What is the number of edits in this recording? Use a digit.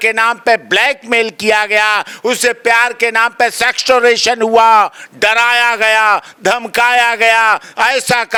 0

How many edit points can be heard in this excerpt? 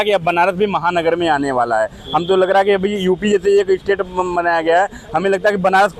0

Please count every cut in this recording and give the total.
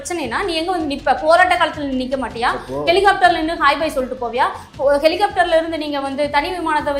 0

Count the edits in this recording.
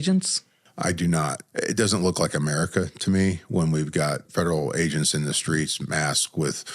2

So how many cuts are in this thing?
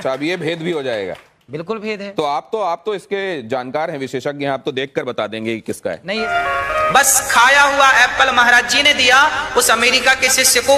1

